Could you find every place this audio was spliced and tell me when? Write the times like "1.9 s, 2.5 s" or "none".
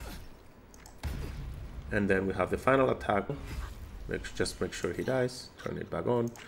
3.3 s